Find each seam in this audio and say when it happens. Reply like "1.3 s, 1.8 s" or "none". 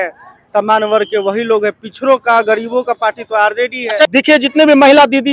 4.0 s